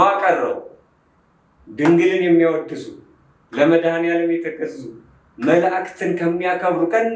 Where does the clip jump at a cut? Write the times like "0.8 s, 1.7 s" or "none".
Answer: none